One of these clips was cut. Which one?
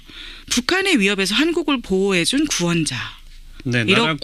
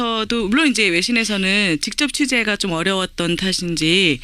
second; 1 cut; at 1.3 s

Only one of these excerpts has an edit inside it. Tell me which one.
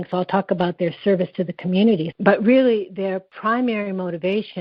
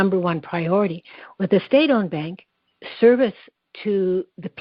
first; 2 cuts; at 2.1 s, 3.3 s

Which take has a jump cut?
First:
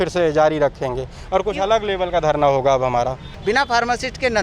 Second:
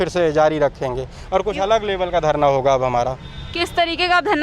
first; 1 cut; at 3.3 s

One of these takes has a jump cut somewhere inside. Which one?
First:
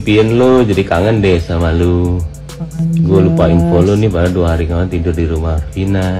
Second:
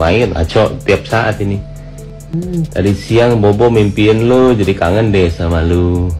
second; 1 cut; at 2.3 s

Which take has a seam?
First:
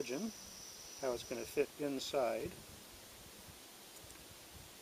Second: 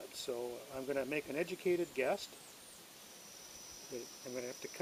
first; 1 cut; at 1.7 s

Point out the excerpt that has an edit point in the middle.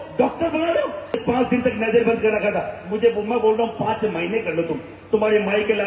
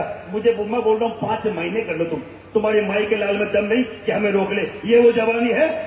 first; 1 cut; at 1.2 s

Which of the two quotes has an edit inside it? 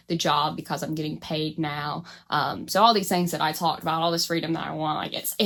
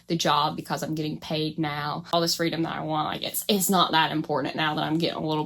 second; 1 cut; at 2.1 s

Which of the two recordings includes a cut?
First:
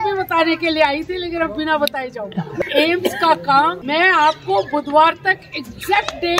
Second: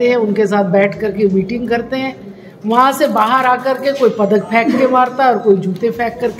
first; 2 cuts; at 2.5 s, 3.8 s

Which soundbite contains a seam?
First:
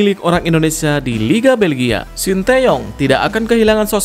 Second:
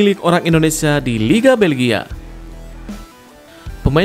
first; 1 cut; at 2.1 s

